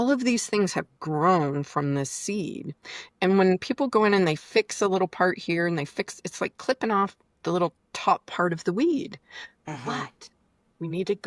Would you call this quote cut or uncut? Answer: uncut